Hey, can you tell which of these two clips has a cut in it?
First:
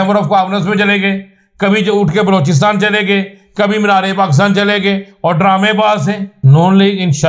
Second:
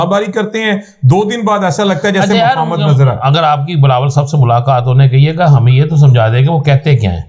first; 1 cut; at 6.3 s

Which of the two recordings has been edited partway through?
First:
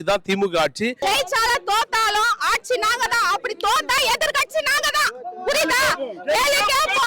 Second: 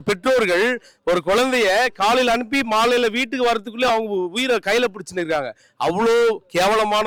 first; 1 cut; at 1.0 s

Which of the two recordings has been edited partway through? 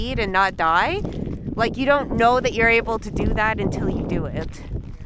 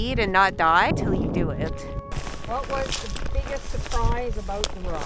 second; 2 cuts; at 0.9 s, 2.1 s

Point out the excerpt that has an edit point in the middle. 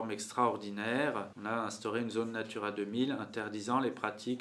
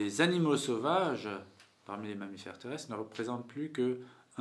first; 1 cut; at 1.3 s

